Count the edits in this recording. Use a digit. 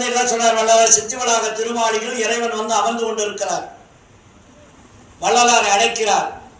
0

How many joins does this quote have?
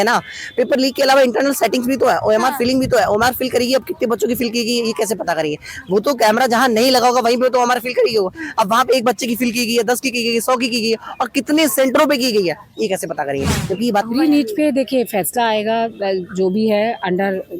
1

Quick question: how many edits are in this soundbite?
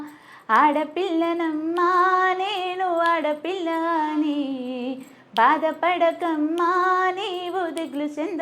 0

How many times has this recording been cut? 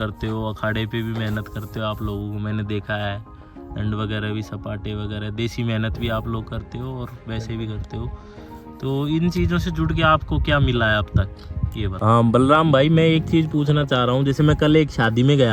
1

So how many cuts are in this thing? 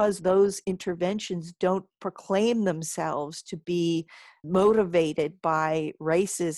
1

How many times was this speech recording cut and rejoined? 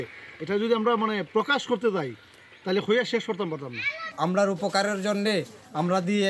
1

